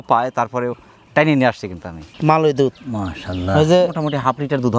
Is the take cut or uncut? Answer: cut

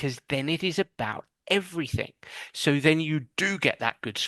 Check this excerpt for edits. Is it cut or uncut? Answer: uncut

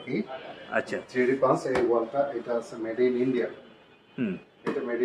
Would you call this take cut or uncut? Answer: uncut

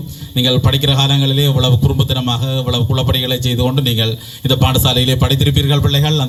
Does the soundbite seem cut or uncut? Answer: uncut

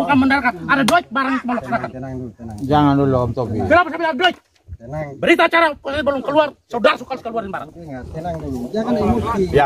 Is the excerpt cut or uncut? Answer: uncut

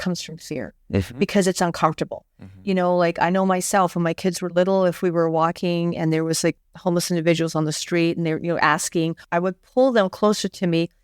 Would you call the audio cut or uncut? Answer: cut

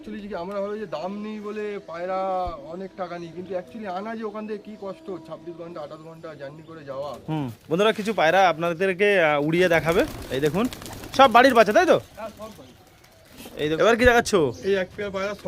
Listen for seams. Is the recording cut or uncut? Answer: cut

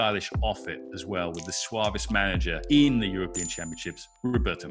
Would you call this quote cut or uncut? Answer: cut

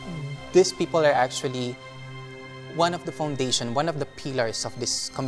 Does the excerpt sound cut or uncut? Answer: uncut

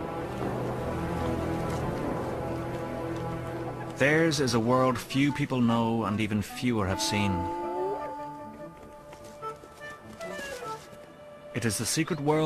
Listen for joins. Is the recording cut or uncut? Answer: uncut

